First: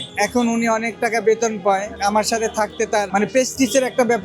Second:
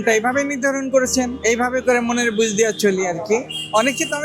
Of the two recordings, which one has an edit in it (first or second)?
first